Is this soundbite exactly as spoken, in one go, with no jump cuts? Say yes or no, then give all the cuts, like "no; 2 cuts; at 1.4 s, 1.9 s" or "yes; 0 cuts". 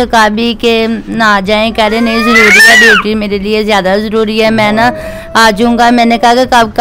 yes; 0 cuts